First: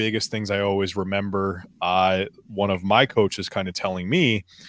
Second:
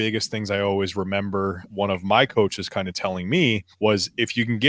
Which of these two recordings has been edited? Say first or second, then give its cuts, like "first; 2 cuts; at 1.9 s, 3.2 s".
second; 2 cuts; at 1.6 s, 3.7 s